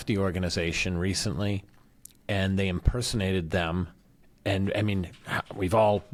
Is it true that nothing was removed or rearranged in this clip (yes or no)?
yes